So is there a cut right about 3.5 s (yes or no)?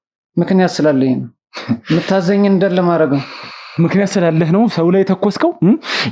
no